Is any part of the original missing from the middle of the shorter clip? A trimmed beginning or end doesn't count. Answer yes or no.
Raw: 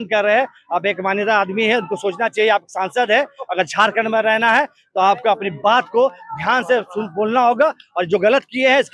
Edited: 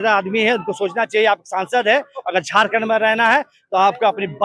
no